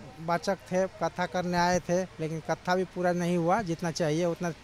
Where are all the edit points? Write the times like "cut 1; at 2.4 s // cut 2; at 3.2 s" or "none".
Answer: none